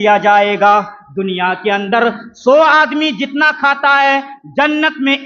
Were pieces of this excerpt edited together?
no; 0 cuts

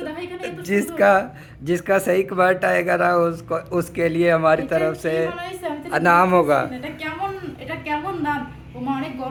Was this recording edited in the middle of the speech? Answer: no; 0 cuts

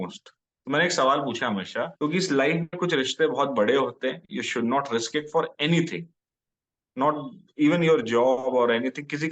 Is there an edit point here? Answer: yes; 1 cut; at 1.9 s

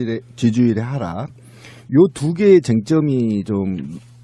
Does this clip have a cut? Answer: yes; 1 cut; at 2.7 s

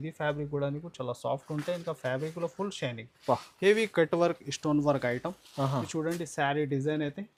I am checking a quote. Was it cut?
no; 0 cuts

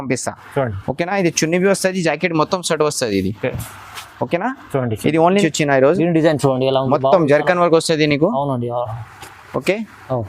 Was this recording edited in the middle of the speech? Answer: yes; 1 cut; at 5.4 s

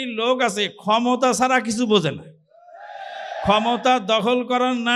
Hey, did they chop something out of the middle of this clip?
no; 0 cuts

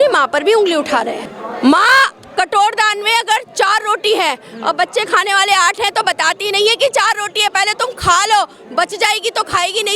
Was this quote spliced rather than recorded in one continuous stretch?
yes; 1 cut; at 1.3 s

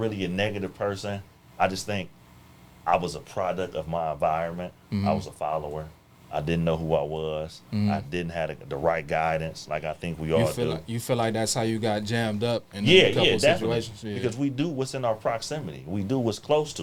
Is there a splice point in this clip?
no; 0 cuts

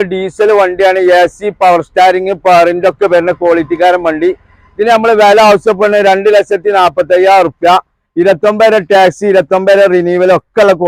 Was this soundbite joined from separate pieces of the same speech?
no; 0 cuts

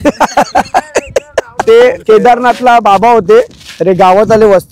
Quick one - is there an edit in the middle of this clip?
yes; 1 cut; at 1.6 s

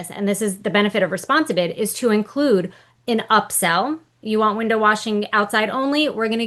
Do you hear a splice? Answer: no; 0 cuts

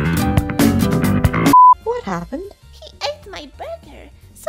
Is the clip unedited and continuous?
no; 1 cut; at 1.8 s

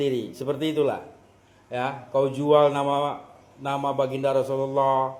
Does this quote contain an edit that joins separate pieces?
no; 0 cuts

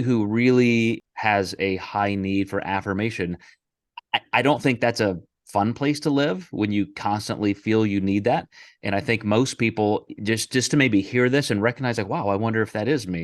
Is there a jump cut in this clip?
yes; 1 cut; at 1.1 s

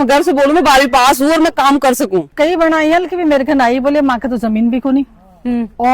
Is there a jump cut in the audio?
yes; 1 cut; at 2.3 s

